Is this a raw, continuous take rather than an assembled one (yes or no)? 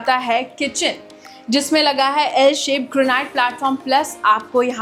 yes